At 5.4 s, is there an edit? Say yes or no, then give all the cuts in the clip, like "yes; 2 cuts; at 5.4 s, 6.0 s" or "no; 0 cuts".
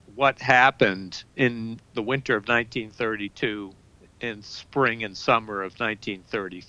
no; 1 cut; at 1.8 s